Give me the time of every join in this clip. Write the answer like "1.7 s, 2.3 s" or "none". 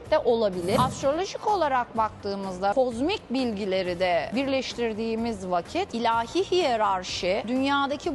0.8 s, 2.7 s